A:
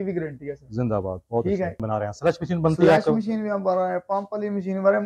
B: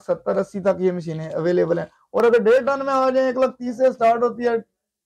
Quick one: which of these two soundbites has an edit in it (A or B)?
A